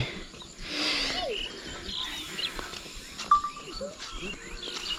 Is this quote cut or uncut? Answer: uncut